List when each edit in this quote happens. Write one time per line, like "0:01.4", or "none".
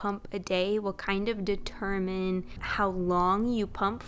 0:02.6